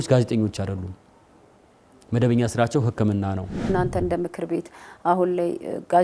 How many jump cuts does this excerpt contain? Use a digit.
1